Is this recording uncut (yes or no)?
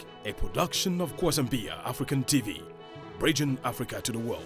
yes